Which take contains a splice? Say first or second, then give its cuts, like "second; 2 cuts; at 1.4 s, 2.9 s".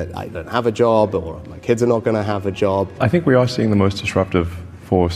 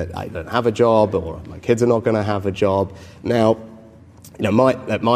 first; 1 cut; at 2.9 s